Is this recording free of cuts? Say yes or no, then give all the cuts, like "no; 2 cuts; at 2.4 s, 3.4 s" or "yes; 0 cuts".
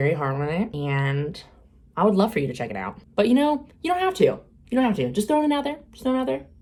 yes; 0 cuts